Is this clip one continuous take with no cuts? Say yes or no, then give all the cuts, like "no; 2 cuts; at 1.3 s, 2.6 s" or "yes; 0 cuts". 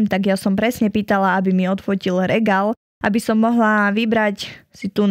yes; 0 cuts